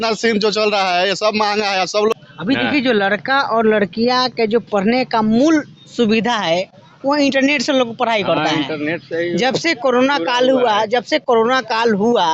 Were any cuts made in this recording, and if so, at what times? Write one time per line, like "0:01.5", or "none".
0:02.1